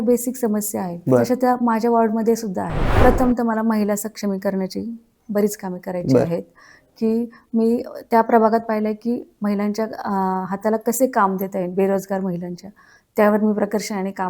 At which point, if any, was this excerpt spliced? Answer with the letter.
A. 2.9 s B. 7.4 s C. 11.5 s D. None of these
A